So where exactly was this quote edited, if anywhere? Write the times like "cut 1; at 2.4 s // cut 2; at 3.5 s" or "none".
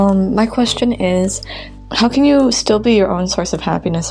none